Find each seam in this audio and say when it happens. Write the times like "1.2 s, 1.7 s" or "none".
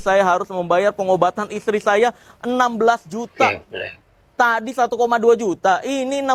none